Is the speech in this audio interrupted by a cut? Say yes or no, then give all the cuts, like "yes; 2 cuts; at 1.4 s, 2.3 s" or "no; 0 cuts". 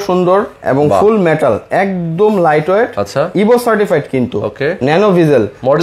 no; 0 cuts